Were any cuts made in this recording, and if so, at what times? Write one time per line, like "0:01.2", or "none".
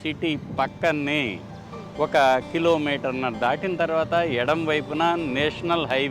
none

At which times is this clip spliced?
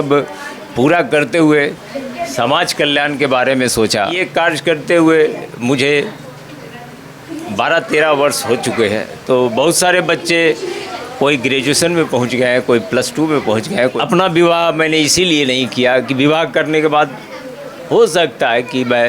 0:04.2
0:13.9

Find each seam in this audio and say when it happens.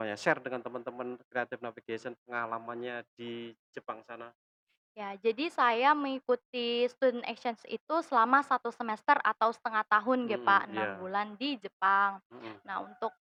none

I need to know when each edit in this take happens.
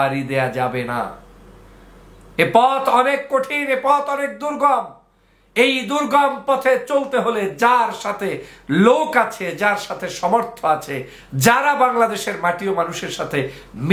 none

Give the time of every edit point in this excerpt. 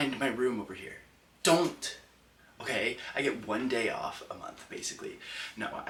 none

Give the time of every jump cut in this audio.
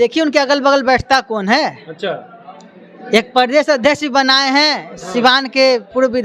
none

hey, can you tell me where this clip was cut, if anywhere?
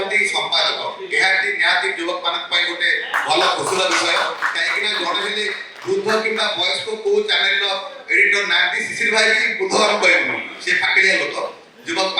none

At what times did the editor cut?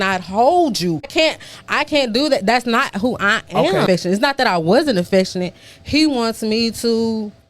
0:04.5

